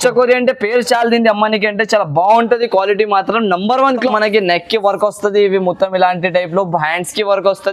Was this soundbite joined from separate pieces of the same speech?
yes; 1 cut; at 4.1 s

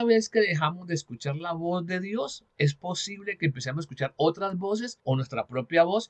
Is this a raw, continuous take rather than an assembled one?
no; 2 cuts; at 2.4 s, 4.9 s

